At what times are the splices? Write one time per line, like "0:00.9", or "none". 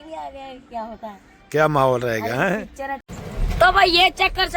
0:03.0